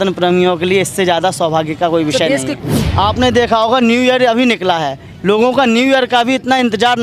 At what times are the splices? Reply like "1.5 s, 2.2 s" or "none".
2.6 s